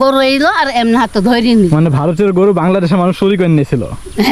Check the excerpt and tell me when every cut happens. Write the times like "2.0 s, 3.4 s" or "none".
none